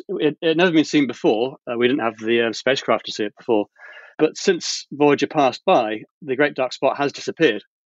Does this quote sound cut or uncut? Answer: cut